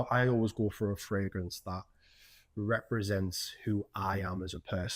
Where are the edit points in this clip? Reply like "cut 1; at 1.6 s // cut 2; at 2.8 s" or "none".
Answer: none